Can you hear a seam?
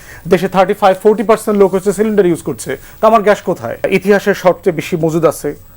yes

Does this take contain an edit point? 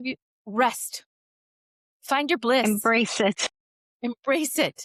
no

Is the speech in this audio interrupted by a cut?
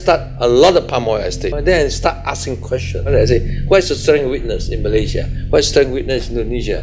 yes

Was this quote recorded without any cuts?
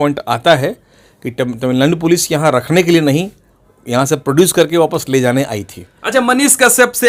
yes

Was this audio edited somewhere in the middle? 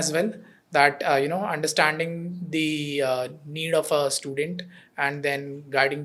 no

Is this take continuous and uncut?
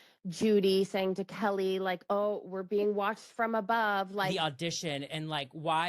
no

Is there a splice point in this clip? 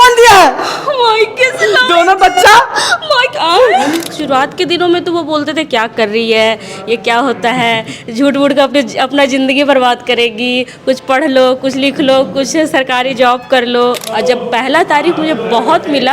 yes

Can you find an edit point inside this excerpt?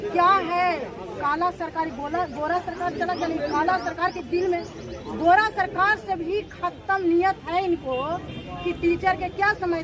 no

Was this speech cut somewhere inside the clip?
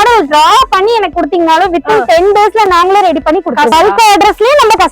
yes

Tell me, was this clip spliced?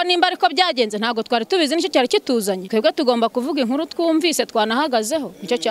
yes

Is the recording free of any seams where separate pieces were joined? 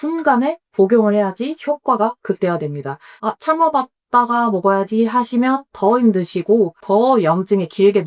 yes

